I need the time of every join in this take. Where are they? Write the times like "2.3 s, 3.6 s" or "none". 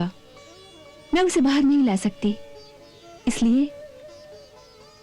none